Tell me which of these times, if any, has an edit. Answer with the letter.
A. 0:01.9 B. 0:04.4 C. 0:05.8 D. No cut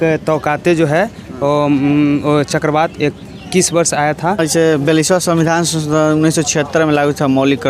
B